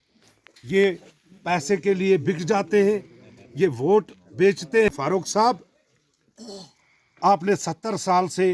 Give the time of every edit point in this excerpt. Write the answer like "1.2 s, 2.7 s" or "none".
4.8 s

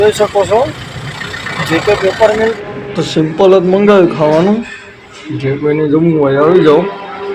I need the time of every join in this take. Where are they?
2.6 s

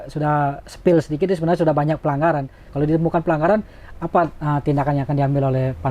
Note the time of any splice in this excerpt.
2.6 s

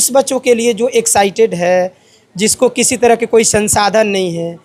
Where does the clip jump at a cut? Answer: none

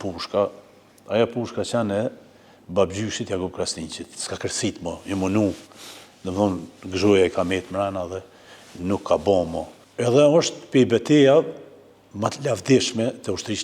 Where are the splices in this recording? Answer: 9.8 s

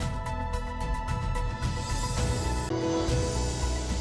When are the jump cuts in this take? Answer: none

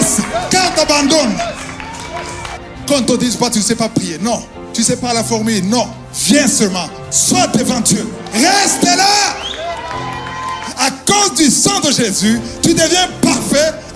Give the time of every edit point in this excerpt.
2.5 s, 10.6 s

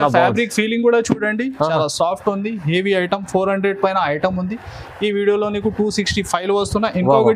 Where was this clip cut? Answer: none

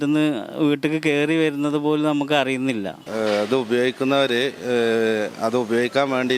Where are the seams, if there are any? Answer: 3.0 s

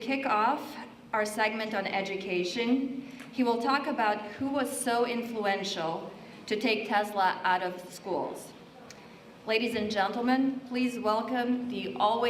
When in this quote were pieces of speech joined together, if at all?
10.4 s

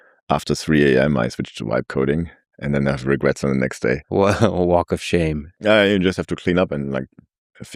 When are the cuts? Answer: 4.0 s, 5.5 s

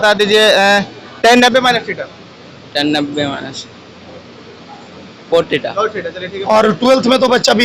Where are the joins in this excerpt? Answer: 6.3 s

